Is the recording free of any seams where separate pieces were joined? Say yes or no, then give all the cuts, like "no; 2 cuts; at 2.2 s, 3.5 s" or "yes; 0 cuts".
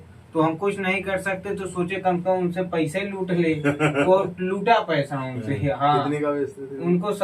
yes; 0 cuts